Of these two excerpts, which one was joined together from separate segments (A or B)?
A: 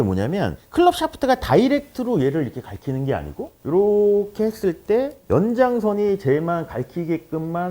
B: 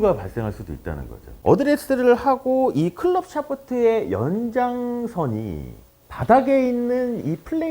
B